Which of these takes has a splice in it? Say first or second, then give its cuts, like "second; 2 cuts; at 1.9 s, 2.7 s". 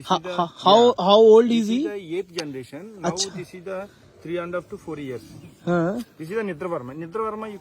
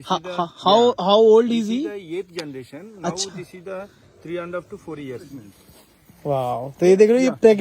second; 1 cut; at 5.5 s